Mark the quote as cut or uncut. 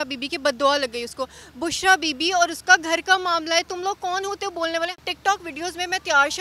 cut